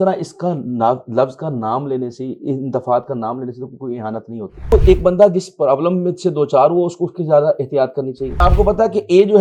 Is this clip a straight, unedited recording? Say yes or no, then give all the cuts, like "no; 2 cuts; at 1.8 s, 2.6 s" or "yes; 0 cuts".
no; 2 cuts; at 4.7 s, 8.4 s